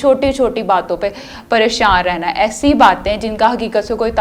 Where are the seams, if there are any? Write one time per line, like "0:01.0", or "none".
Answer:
none